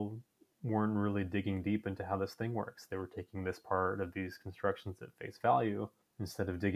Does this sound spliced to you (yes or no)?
no